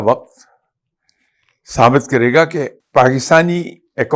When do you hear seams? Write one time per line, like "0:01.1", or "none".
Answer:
0:02.8

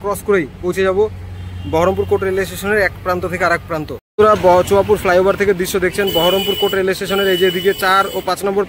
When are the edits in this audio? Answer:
0:04.0

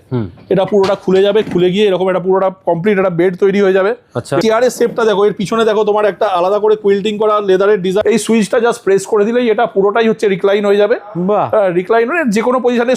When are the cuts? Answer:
0:04.4
0:08.0

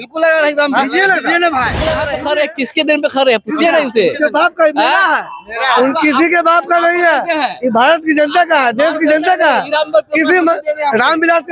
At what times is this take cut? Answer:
0:02.0

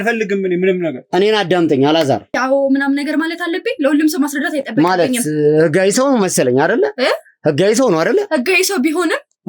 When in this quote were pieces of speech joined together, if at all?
0:02.4

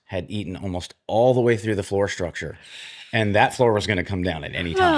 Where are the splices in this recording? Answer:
none

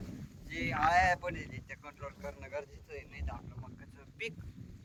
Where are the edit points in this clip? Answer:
none

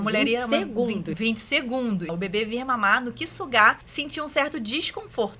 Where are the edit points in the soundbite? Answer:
0:01.1
0:02.1
0:03.9

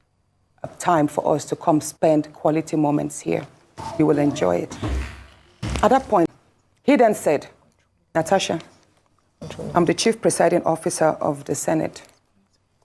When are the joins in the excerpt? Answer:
0:06.3

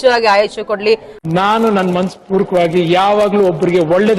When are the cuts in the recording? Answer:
0:01.1

